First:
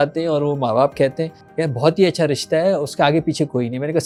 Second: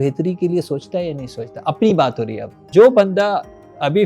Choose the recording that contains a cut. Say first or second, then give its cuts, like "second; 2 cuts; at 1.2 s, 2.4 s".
second; 1 cut; at 2.7 s